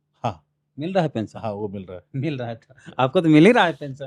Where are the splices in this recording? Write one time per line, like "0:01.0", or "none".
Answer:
none